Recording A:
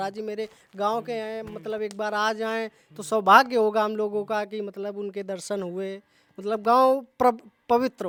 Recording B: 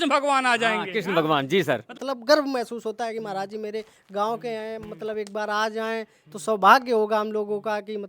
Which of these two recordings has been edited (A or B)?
B